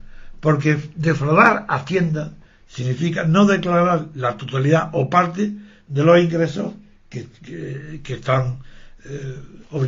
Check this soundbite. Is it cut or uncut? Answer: cut